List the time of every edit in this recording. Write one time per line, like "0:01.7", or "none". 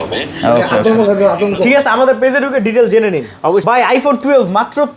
0:03.6